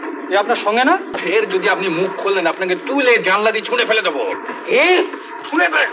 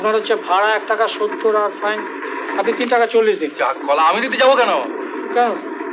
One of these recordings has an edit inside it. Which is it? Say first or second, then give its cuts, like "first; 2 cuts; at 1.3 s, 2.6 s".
first; 1 cut; at 1.1 s